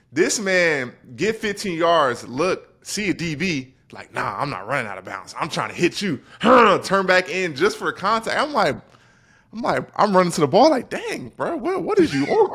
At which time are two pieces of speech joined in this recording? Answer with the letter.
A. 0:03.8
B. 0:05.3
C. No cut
C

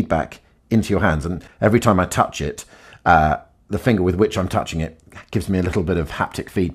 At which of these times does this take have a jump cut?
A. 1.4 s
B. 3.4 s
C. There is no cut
A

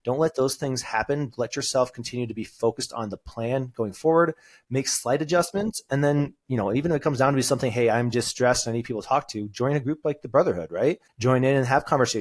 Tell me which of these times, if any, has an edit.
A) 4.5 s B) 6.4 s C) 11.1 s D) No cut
C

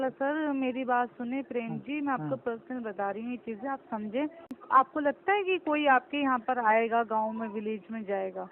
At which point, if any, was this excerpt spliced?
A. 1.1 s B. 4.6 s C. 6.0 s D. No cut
B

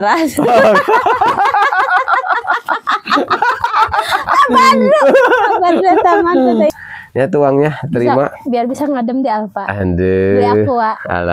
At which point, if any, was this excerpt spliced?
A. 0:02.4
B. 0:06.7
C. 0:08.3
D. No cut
B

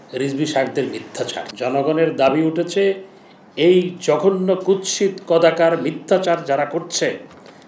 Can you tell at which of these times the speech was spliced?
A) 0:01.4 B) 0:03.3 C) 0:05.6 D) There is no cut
A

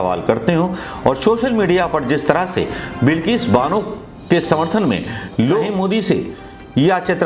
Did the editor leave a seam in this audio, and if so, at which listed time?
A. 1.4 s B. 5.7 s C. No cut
B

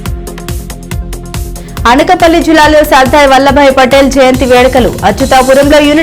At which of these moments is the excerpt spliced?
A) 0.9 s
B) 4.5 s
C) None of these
A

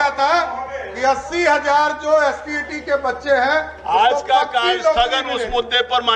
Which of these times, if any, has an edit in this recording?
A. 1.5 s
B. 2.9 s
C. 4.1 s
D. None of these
D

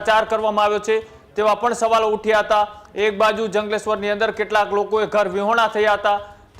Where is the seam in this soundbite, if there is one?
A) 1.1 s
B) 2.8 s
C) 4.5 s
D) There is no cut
D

